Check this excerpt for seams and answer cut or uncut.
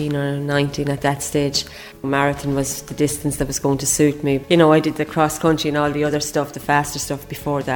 cut